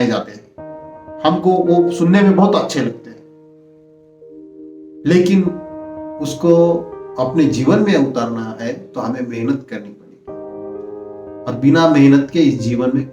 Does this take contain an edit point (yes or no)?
yes